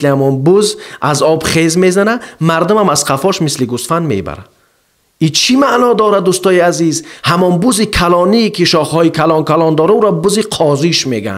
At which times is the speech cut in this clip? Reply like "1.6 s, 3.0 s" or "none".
7.0 s